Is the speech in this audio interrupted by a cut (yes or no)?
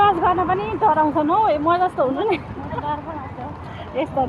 no